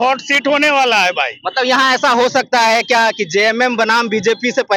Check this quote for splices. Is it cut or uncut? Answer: uncut